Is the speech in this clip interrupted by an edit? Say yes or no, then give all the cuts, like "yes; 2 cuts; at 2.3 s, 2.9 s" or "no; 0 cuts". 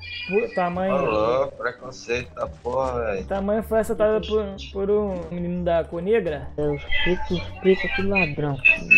no; 0 cuts